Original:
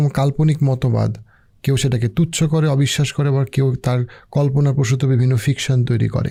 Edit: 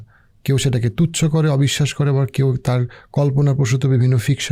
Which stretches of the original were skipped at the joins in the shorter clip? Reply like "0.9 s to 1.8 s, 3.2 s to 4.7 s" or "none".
none